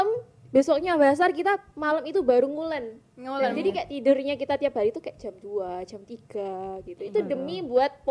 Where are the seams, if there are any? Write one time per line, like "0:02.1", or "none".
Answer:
none